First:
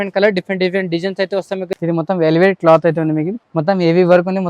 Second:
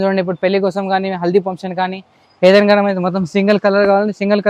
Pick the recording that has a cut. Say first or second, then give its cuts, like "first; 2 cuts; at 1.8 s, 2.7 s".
first; 2 cuts; at 1.7 s, 3.3 s